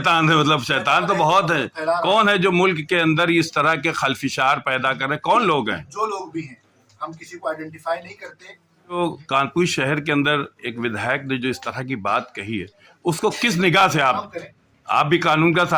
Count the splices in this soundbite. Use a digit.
2